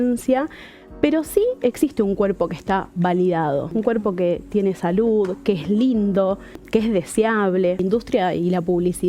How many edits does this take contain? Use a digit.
3